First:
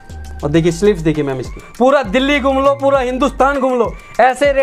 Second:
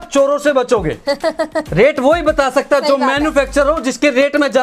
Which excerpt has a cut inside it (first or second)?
first